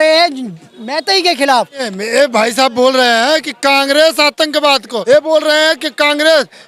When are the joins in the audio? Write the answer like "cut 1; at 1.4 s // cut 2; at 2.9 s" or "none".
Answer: cut 1; at 1.9 s // cut 2; at 4.9 s